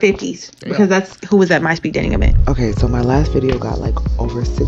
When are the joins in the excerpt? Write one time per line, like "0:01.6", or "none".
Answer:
0:02.3